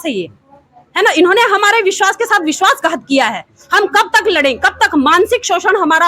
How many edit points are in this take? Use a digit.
0